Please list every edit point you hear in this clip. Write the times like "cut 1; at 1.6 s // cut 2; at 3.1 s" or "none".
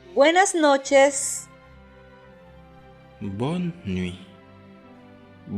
cut 1; at 1.2 s